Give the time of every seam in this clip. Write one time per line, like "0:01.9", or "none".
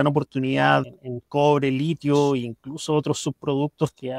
0:00.9